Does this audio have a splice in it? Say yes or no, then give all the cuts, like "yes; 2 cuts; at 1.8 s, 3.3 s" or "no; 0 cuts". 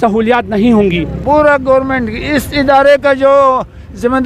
yes; 1 cut; at 1.1 s